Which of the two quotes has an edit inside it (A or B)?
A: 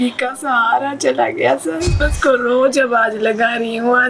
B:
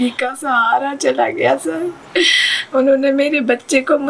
A